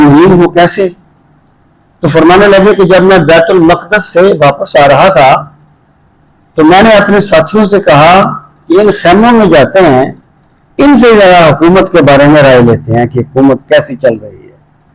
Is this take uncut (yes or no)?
yes